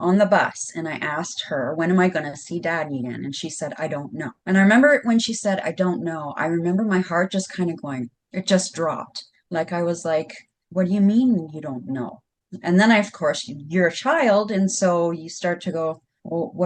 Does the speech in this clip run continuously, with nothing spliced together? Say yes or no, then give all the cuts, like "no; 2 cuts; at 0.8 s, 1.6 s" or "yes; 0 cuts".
yes; 0 cuts